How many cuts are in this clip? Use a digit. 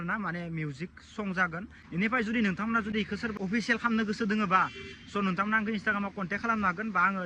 2